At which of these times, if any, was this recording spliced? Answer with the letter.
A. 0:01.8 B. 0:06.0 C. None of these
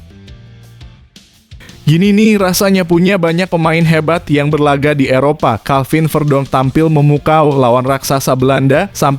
A